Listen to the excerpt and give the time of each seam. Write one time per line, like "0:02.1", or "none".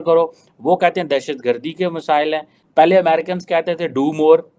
0:02.7